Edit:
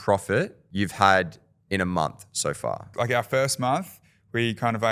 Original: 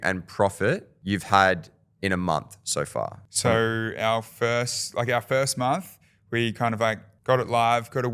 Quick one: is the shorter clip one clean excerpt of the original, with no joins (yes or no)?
no